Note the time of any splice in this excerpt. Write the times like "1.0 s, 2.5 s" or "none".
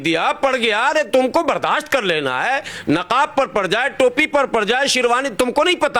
none